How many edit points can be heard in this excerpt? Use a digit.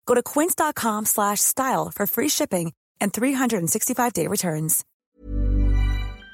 1